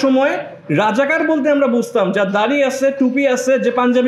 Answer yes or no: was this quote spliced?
no